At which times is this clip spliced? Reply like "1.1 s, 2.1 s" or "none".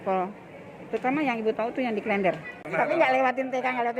2.6 s